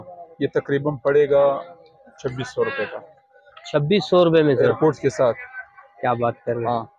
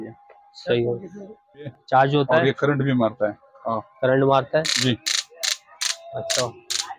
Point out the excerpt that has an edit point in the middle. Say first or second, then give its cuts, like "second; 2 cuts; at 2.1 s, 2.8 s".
second; 1 cut; at 1.7 s